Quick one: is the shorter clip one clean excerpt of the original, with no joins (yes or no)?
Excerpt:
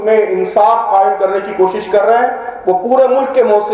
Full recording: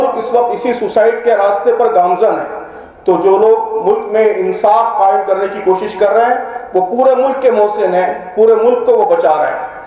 yes